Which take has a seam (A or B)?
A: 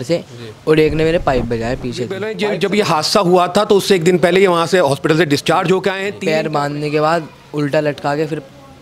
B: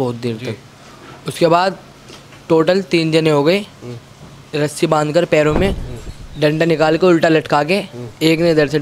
A